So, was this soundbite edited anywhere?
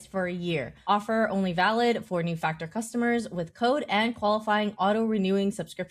no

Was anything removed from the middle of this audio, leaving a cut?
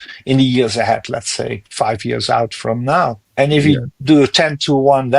yes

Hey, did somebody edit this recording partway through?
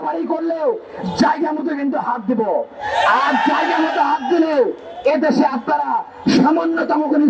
no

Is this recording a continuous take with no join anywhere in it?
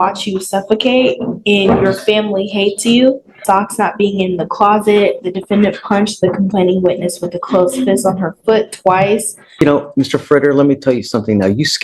no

